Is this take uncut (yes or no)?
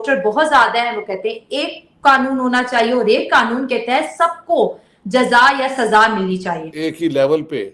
no